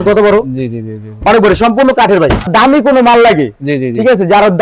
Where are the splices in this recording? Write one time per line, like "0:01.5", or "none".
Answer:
0:02.5